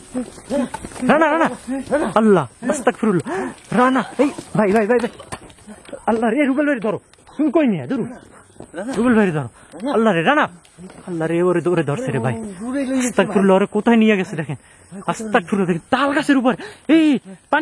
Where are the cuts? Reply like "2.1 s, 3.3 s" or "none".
none